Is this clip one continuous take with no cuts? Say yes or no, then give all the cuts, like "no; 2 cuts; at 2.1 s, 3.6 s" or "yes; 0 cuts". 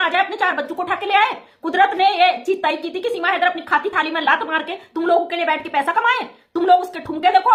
yes; 0 cuts